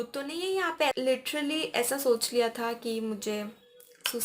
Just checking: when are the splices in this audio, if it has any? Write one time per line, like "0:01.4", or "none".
0:00.9